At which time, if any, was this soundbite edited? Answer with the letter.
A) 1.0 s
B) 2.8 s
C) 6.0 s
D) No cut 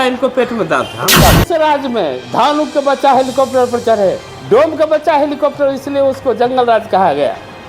A